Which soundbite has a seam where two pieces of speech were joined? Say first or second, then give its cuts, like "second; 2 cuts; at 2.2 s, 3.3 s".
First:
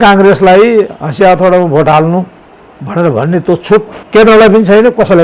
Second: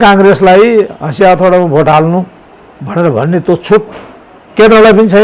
first; 1 cut; at 4.0 s